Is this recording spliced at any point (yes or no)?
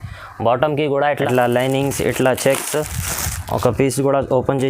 yes